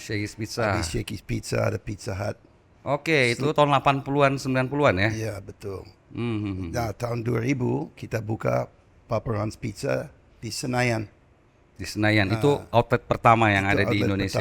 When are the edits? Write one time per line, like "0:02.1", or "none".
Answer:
none